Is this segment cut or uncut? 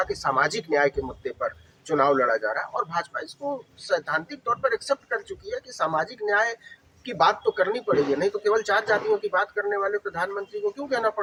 uncut